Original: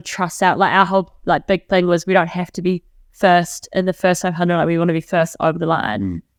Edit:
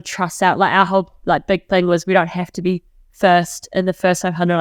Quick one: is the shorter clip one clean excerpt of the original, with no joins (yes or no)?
yes